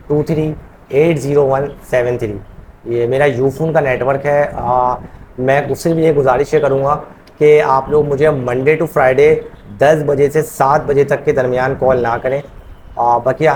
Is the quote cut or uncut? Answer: uncut